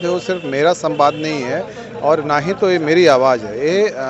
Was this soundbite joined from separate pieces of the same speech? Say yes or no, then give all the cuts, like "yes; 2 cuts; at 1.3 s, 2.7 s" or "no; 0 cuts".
no; 0 cuts